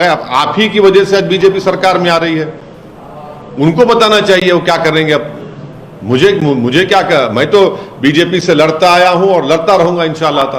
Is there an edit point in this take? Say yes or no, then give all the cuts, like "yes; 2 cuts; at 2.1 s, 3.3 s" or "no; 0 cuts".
no; 0 cuts